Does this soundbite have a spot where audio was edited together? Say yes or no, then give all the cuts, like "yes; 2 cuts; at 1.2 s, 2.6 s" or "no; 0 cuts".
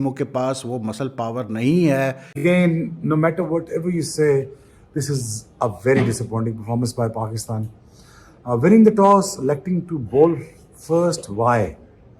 yes; 1 cut; at 2.3 s